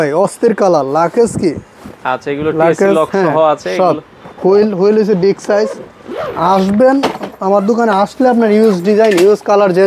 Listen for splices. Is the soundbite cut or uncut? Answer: uncut